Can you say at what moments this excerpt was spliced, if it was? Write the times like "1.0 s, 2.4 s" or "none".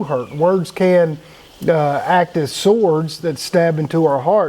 none

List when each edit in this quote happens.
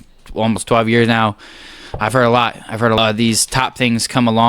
3.0 s

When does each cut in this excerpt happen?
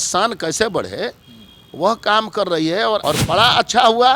3.0 s

